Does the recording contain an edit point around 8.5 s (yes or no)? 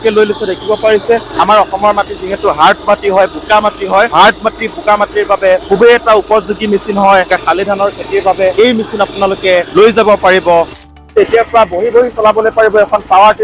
yes